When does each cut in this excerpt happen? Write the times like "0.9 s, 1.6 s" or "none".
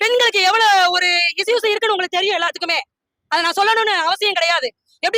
none